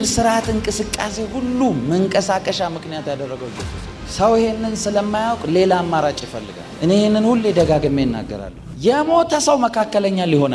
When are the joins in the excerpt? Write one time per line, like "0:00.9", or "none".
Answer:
0:06.7